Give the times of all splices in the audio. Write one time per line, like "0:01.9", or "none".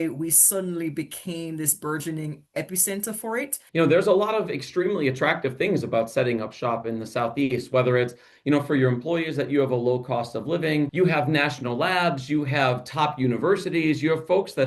0:03.6
0:10.9